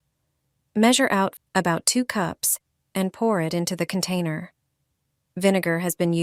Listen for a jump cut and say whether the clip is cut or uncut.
cut